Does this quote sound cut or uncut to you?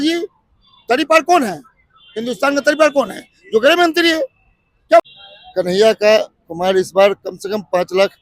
cut